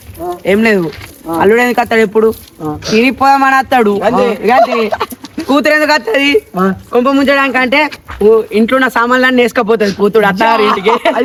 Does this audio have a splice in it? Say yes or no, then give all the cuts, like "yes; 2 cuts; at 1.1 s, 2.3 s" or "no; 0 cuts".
no; 0 cuts